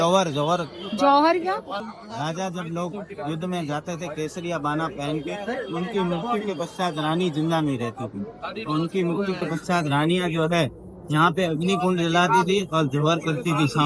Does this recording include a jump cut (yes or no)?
yes